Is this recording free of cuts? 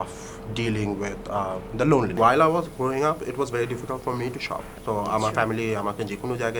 no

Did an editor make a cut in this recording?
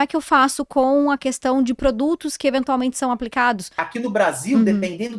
yes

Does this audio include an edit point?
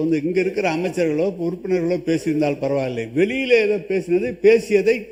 no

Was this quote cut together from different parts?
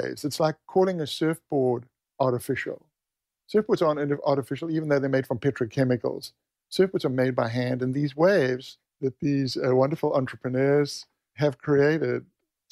no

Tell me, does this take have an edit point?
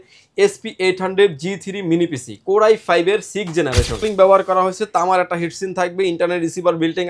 yes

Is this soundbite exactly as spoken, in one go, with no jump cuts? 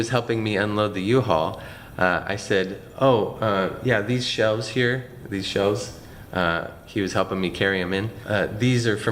yes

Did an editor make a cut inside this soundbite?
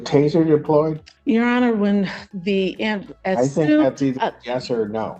yes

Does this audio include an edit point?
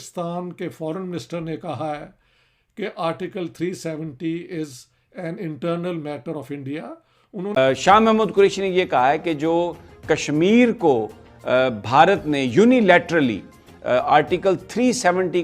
yes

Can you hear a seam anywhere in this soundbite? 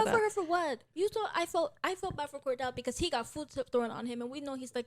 no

